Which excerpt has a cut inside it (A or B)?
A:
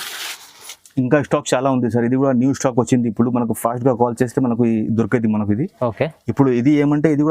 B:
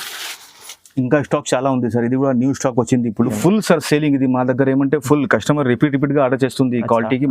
B